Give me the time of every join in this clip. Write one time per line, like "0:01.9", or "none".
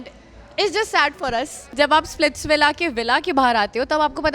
0:01.6